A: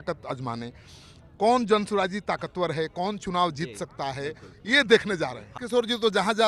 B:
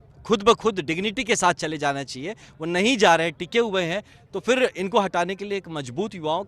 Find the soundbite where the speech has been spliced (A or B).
A